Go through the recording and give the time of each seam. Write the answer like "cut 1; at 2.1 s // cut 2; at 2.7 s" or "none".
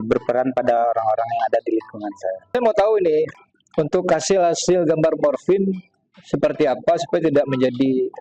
cut 1; at 2.6 s

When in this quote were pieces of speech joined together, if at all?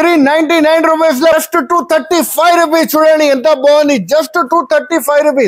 cut 1; at 1.3 s

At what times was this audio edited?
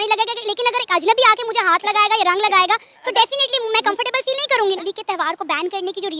cut 1; at 4.8 s

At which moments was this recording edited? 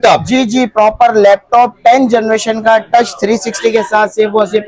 none

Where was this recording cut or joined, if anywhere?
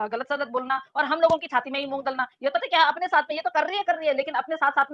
none

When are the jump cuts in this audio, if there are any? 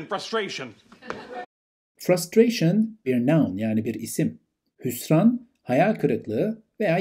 none

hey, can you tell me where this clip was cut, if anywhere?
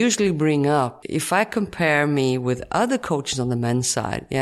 cut 1; at 1.0 s

